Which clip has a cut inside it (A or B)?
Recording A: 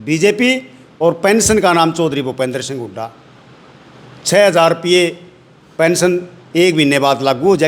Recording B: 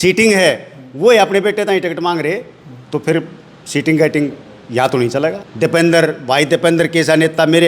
B